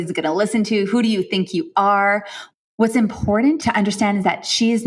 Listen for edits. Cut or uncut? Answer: cut